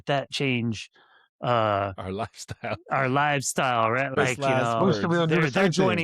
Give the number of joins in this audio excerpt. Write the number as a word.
one